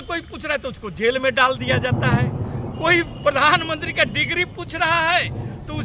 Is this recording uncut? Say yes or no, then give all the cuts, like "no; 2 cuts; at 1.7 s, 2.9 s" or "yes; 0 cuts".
yes; 0 cuts